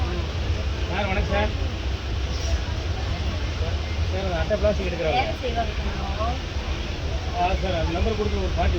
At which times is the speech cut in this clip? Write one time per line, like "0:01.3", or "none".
none